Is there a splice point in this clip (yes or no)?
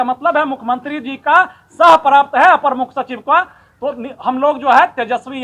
no